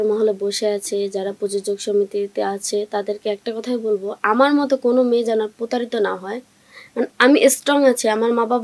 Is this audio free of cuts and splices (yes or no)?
yes